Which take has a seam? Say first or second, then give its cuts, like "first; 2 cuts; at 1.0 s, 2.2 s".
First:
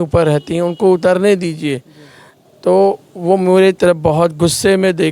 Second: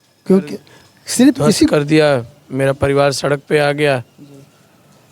second; 1 cut; at 1.7 s